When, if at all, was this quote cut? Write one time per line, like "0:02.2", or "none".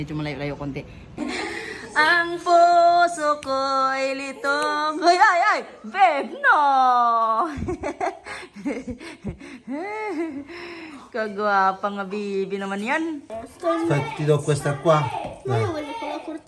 0:01.2
0:13.4